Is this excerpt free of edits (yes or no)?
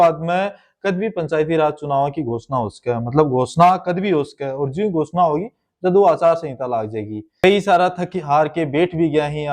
no